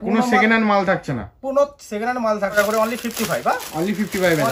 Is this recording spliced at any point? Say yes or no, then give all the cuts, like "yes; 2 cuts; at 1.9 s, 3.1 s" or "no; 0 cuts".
yes; 1 cut; at 2.6 s